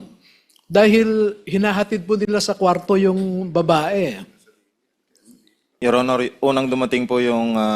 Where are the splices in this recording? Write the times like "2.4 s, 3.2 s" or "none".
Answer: 5.8 s